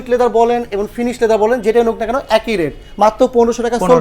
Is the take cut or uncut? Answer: uncut